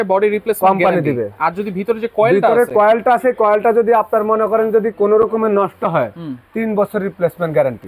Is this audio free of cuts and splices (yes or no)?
yes